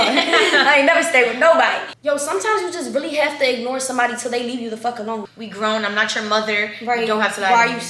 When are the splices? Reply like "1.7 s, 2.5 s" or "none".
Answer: 1.9 s, 5.3 s